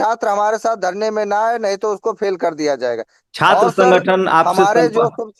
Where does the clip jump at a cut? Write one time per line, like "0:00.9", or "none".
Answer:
none